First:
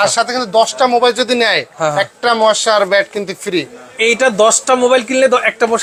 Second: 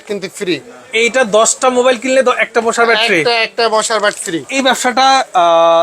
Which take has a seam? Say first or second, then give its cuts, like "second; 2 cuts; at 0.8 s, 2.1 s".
second; 1 cut; at 4.4 s